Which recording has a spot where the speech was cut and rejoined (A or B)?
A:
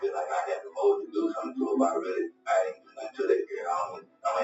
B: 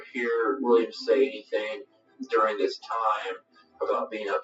B